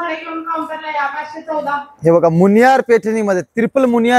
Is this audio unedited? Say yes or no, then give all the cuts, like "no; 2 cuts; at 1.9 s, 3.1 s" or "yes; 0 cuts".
yes; 0 cuts